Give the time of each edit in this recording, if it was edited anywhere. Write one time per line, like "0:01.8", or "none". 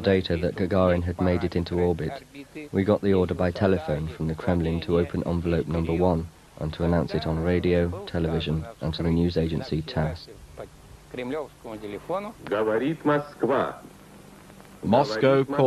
0:04.3